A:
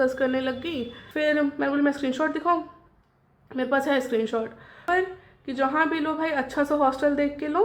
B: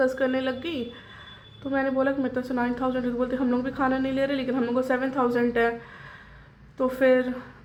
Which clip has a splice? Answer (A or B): A